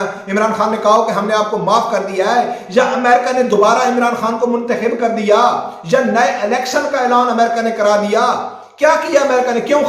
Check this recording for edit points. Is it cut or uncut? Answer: uncut